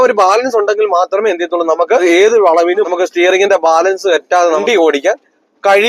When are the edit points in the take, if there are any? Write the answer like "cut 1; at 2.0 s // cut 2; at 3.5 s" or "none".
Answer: cut 1; at 2.0 s // cut 2; at 2.9 s // cut 3; at 4.6 s

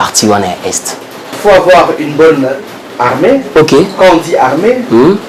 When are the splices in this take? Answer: cut 1; at 1.3 s

